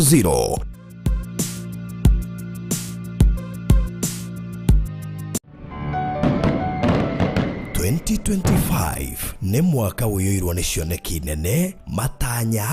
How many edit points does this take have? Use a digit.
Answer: 1